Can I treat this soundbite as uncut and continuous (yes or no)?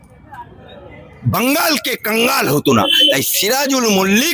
yes